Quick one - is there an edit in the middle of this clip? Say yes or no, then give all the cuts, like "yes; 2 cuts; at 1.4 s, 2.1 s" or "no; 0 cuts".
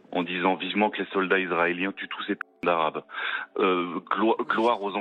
no; 0 cuts